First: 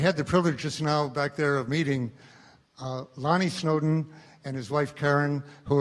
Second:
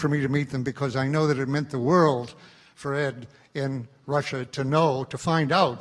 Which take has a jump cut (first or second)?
first